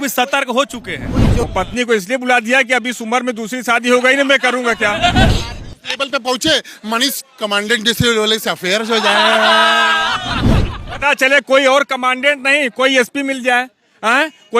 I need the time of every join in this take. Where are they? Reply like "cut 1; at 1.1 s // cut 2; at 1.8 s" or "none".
cut 1; at 1.4 s // cut 2; at 5.3 s